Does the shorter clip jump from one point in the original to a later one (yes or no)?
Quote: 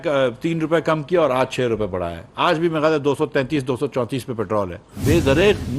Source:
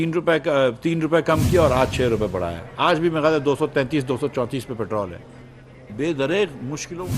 yes